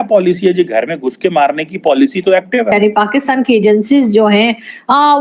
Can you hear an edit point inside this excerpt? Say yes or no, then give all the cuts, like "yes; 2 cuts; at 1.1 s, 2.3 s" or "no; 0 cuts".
yes; 1 cut; at 2.7 s